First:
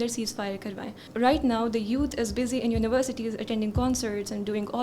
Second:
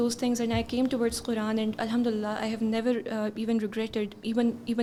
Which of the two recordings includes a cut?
first; 1 cut; at 1.1 s

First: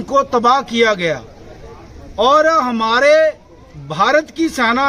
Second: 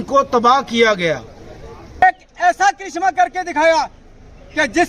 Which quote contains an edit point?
second; 1 cut; at 2.0 s

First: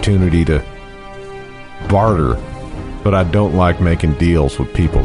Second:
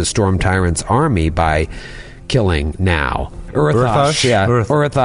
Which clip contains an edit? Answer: second; 1 cut; at 3.4 s

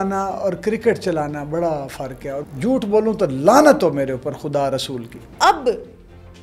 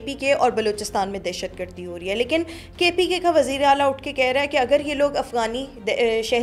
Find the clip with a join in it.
first; 2 cuts; at 2.4 s, 5.3 s

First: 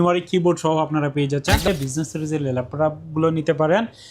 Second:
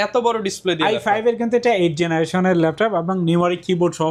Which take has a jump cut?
first; 1 cut; at 1.7 s

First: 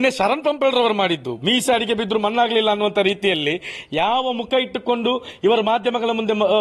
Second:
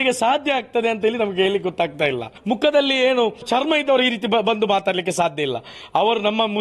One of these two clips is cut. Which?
second; 2 cuts; at 2.3 s, 3.4 s

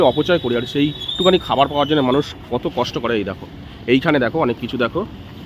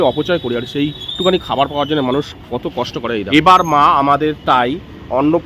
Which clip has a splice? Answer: second; 1 cut; at 3.2 s

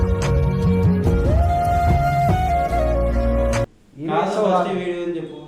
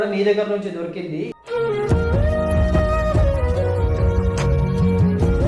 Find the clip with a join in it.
first; 1 cut; at 3.7 s

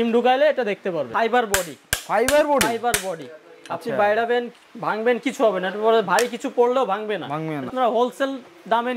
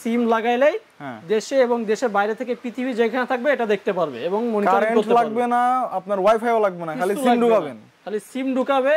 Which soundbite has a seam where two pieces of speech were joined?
first; 2 cuts; at 1.1 s, 7.7 s

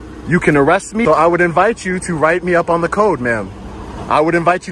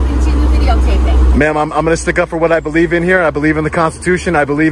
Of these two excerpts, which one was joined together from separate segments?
first; 1 cut; at 1.0 s

